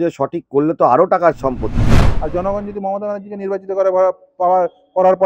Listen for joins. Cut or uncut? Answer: cut